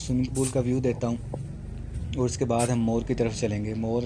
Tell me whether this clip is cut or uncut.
uncut